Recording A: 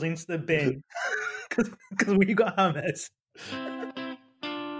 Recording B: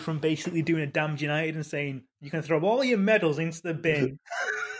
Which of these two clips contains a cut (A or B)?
A